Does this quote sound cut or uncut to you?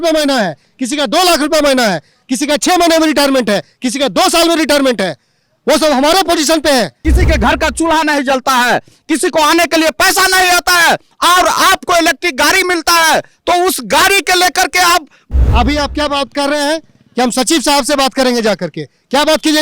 cut